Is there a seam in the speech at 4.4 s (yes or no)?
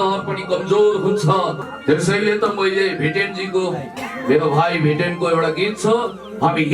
no